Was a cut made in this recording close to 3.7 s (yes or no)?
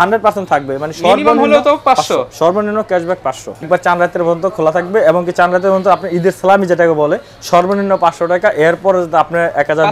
yes